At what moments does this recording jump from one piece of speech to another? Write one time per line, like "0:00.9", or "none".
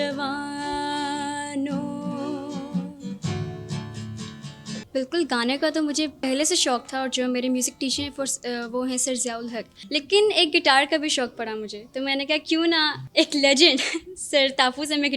0:04.9
0:06.2
0:09.7
0:13.0

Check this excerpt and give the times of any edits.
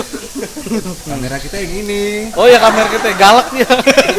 0:01.0

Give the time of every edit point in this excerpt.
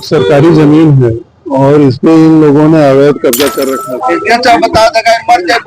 0:03.8

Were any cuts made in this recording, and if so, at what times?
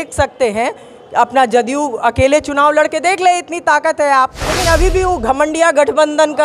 0:04.4

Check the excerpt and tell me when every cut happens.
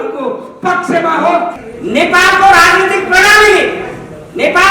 0:01.6

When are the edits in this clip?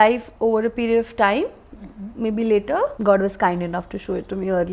0:03.0

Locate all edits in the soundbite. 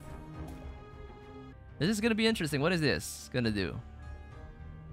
0:01.6

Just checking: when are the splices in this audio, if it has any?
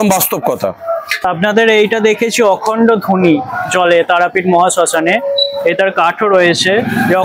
0:01.2

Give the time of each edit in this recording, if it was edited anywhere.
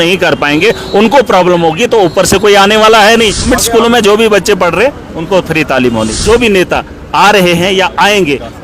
0:03.5
0:06.2

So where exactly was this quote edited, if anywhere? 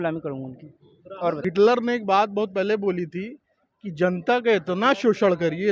0:01.4

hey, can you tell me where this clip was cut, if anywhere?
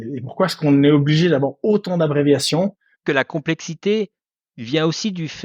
0:03.0

